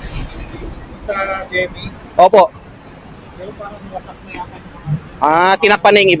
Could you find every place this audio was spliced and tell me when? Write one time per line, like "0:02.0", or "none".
none